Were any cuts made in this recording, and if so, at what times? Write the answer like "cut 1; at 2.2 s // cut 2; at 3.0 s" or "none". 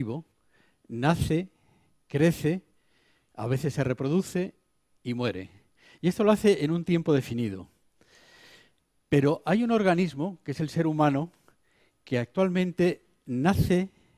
none